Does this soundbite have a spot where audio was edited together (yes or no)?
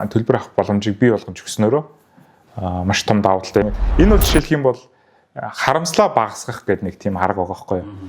yes